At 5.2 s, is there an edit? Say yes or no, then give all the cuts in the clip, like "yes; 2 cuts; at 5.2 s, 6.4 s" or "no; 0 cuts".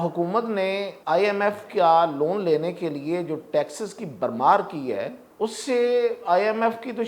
yes; 2 cuts; at 0.9 s, 5.2 s